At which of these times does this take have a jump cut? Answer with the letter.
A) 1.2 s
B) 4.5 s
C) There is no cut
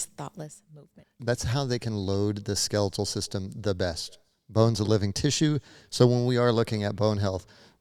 A